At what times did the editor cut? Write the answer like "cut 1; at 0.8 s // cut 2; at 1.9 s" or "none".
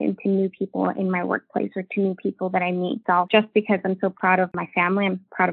cut 1; at 3.0 s